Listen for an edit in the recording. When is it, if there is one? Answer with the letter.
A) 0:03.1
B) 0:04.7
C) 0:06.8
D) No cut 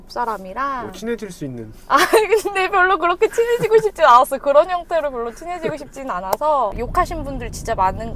C